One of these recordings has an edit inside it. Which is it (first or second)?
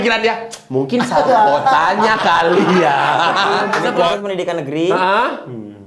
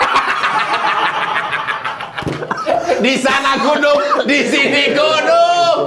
first